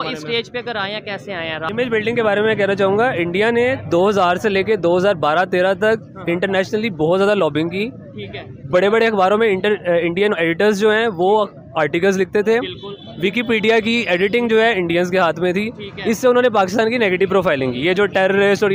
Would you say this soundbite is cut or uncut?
cut